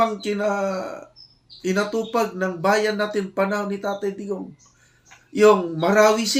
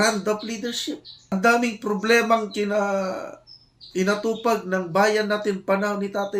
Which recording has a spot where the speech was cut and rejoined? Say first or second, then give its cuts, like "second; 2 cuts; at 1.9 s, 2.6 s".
second; 1 cut; at 1.3 s